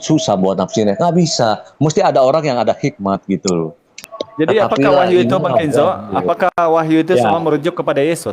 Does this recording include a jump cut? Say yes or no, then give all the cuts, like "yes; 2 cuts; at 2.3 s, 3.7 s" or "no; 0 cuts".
yes; 1 cut; at 4.1 s